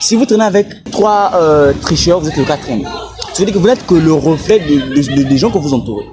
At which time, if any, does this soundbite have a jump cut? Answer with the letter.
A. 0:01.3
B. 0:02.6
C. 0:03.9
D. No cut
D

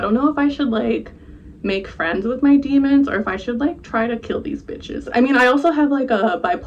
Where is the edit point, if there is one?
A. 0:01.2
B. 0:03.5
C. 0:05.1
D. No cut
C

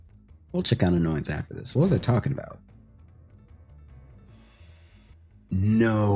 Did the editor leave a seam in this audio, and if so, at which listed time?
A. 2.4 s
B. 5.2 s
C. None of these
B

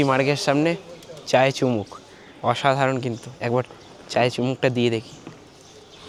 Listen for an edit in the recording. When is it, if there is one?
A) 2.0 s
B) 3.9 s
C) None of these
C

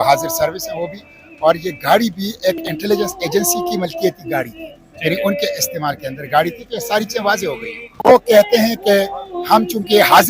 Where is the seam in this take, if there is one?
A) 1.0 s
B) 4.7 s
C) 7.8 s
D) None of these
C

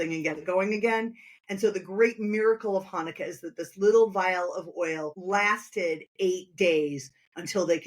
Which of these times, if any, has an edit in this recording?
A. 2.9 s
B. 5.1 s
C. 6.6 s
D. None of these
B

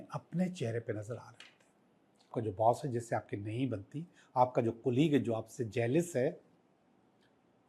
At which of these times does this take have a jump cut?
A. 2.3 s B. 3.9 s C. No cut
A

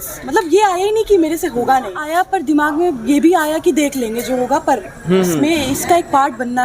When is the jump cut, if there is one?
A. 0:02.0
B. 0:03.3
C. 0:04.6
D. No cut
A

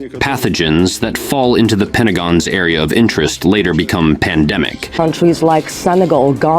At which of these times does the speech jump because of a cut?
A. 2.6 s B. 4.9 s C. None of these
B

